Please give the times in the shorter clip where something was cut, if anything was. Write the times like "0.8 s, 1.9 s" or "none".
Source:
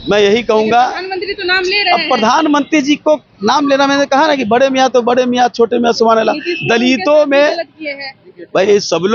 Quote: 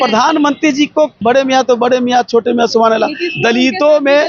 1.2 s